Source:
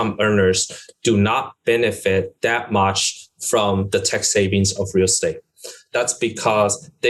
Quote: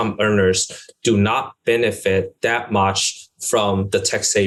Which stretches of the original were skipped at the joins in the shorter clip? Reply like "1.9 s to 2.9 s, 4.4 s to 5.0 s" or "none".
none